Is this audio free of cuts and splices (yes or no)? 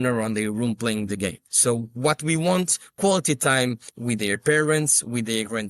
no